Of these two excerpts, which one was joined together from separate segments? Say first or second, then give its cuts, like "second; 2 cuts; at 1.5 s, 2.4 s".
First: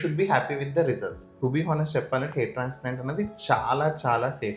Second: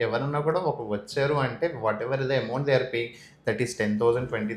first; 1 cut; at 1.2 s